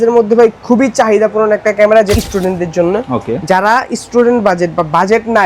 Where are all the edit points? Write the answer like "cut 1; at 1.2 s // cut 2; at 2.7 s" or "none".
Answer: cut 1; at 2.2 s